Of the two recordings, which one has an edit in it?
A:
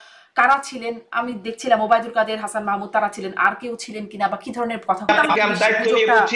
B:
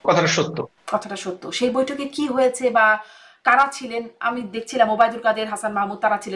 A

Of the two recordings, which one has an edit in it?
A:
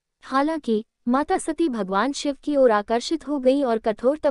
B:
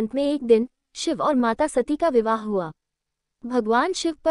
B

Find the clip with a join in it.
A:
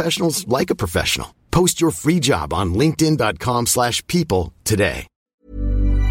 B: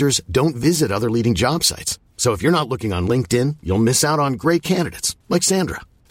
A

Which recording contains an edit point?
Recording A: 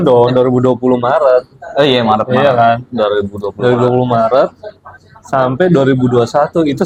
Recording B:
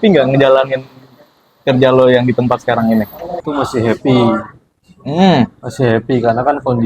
B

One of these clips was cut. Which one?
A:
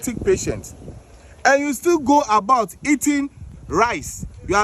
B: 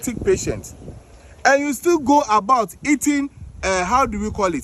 A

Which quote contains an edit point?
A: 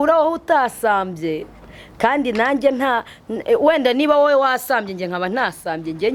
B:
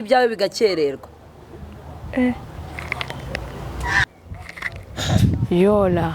B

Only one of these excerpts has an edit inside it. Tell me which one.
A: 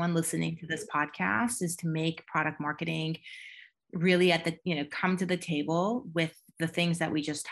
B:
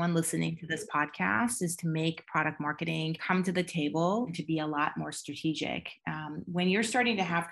B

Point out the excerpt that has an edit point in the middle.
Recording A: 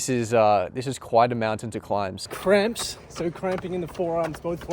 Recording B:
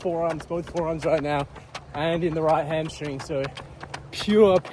A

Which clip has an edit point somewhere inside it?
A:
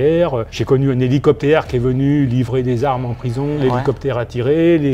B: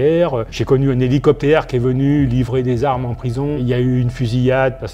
A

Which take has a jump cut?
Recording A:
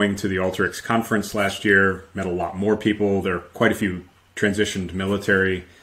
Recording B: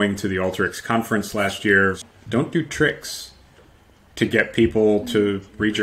B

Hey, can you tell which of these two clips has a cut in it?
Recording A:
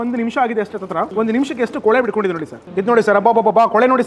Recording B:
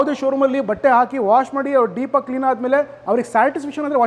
A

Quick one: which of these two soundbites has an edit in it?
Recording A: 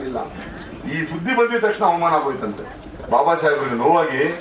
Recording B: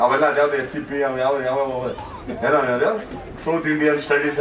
A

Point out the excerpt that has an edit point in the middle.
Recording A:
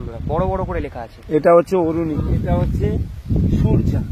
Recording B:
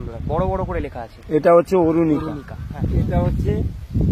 A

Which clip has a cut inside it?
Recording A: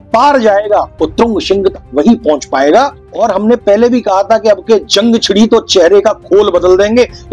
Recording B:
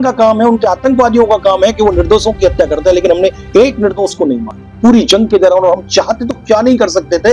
A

